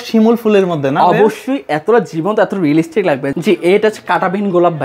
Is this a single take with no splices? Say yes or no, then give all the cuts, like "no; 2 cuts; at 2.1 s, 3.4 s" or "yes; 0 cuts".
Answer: no; 1 cut; at 3.3 s